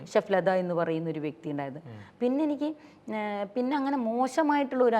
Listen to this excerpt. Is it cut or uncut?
uncut